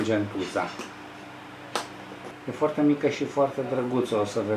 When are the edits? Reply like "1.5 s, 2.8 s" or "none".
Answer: 2.3 s

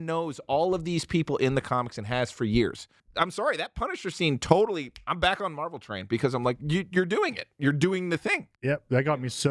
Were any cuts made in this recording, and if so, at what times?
3.0 s, 8.5 s

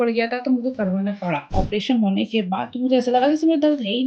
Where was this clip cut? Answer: 1.5 s

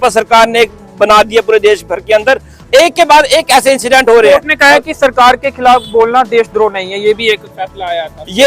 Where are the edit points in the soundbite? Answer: none

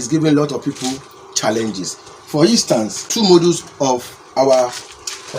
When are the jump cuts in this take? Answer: 3.1 s

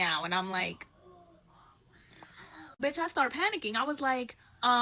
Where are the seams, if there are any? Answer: 2.8 s

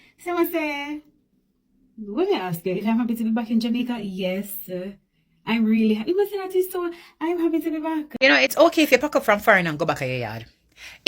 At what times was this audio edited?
8.1 s

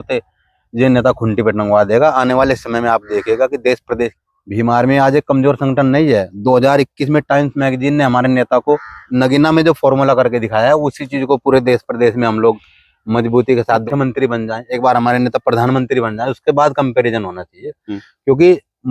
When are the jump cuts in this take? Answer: 4.1 s, 9.0 s, 13.8 s

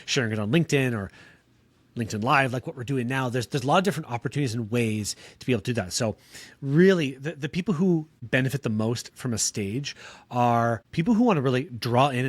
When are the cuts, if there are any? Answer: 8.1 s, 10.8 s

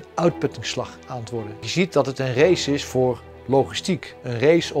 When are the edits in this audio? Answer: 1.5 s

